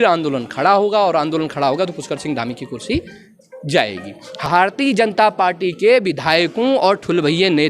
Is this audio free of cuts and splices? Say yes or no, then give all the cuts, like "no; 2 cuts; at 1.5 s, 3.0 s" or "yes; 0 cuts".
no; 1 cut; at 4.5 s